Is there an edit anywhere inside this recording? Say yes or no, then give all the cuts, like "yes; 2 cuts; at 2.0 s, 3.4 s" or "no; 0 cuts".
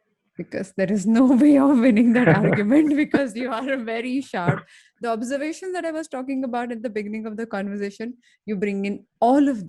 no; 0 cuts